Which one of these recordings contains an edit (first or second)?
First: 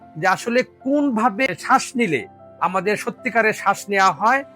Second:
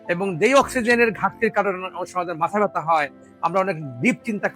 first